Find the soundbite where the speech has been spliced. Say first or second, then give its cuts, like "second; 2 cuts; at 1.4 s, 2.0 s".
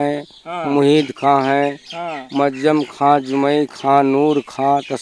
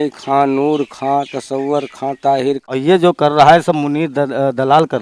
second; 1 cut; at 2.6 s